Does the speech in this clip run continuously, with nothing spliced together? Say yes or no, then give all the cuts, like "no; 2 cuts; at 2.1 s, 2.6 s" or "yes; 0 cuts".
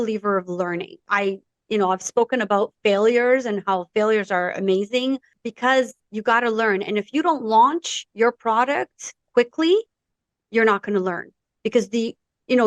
no; 3 cuts; at 1.0 s, 5.4 s, 6.0 s